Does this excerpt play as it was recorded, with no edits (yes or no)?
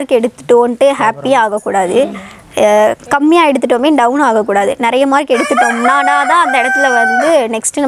yes